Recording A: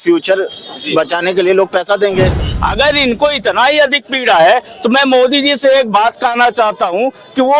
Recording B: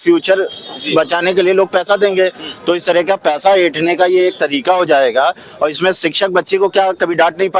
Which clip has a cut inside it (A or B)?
A